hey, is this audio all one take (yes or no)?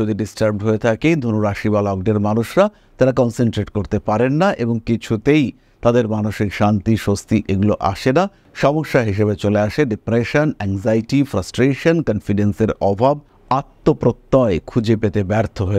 yes